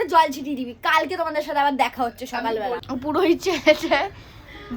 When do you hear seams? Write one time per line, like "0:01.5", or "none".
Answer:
0:02.8